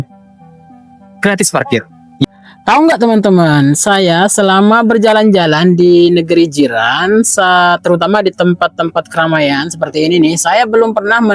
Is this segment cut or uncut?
cut